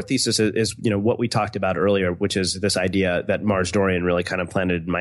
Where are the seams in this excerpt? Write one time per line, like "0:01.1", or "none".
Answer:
none